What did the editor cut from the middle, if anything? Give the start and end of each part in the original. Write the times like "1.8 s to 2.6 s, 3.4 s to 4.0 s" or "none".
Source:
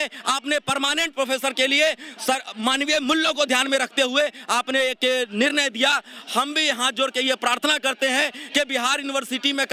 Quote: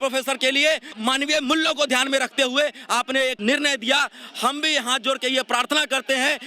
2.1 s to 2.5 s, 5.0 s to 5.3 s